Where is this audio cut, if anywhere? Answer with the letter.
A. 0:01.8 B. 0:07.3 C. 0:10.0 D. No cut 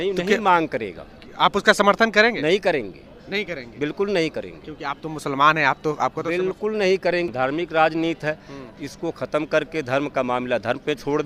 B